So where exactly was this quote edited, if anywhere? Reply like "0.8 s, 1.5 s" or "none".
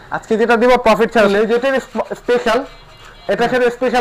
1.3 s